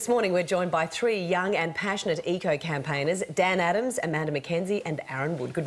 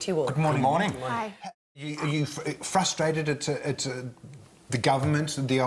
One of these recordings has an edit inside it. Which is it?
second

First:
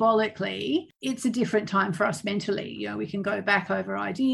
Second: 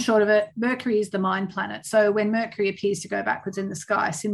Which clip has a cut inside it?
first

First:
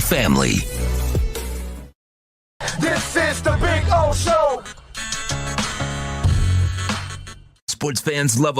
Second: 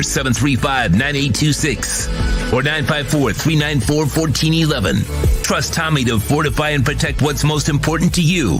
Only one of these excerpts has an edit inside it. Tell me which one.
first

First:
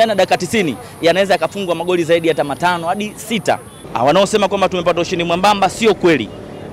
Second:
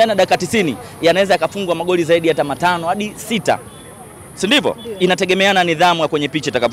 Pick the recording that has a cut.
first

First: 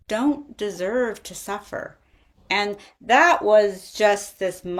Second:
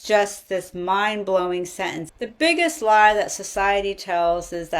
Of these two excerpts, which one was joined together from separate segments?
second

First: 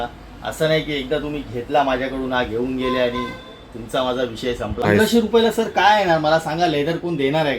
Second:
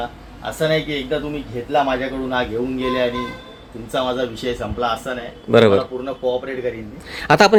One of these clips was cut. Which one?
first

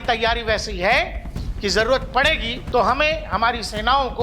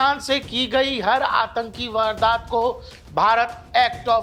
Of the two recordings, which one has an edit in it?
first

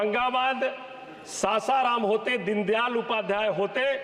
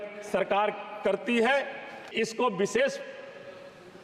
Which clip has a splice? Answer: second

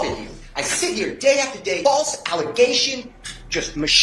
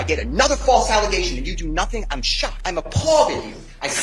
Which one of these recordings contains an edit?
first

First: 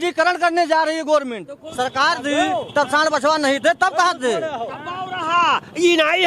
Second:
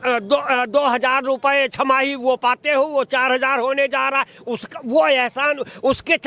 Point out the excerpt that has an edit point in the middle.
first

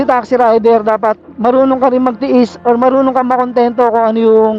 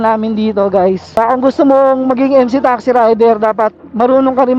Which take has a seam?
second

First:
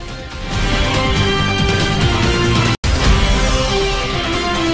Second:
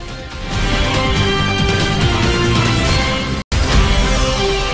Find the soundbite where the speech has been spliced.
second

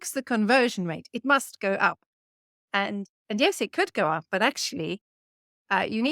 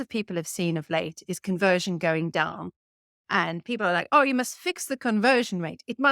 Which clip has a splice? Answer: second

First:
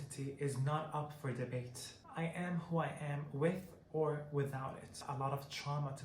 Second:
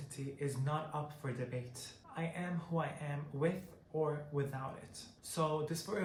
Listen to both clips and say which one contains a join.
first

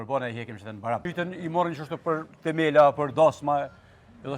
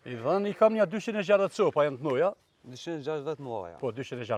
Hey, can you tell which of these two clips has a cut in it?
first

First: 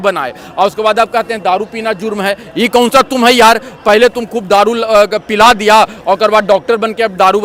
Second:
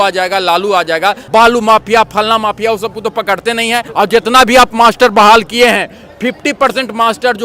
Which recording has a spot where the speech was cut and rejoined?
second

